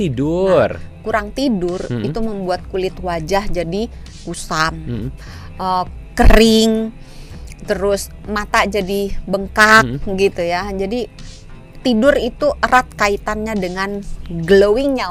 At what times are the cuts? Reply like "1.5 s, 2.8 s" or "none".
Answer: none